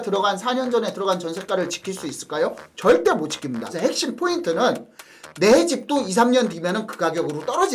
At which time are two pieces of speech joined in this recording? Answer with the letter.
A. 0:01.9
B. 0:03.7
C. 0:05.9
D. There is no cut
B